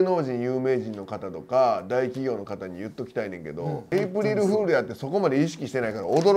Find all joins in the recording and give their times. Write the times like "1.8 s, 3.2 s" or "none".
3.8 s

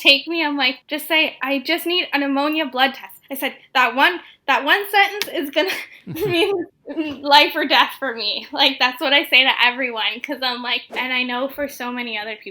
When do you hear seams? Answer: 10.9 s

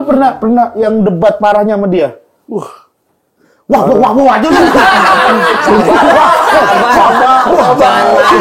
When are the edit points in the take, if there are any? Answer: none

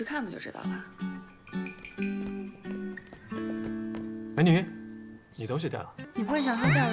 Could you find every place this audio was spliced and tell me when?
6.0 s

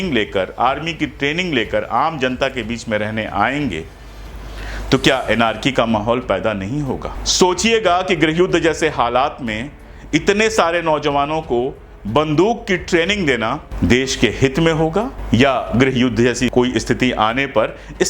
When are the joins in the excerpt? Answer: 7.2 s, 13.7 s, 15.2 s, 16.5 s

